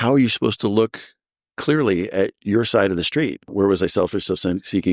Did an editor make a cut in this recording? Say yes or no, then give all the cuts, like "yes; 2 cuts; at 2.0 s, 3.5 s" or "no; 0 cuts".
yes; 1 cut; at 3.5 s